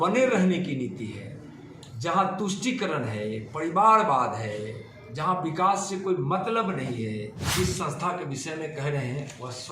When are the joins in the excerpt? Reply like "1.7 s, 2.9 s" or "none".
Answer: 7.4 s